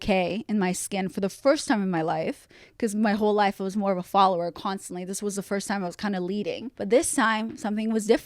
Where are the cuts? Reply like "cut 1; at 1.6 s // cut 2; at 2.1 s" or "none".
cut 1; at 6.7 s